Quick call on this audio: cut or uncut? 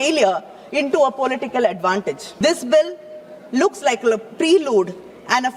cut